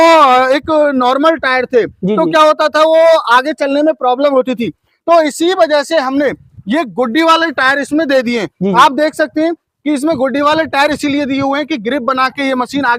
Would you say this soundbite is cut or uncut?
uncut